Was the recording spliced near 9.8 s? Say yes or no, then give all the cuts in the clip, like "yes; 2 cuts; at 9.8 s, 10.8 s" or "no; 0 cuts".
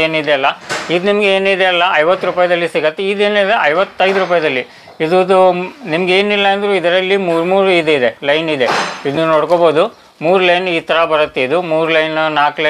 no; 0 cuts